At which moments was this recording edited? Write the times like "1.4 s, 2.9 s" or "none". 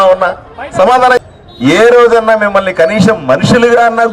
1.2 s